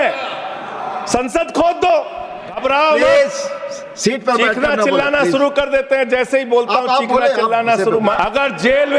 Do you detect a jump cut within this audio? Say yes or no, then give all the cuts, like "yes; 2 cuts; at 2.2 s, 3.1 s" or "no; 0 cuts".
yes; 2 cuts; at 2.6 s, 8.2 s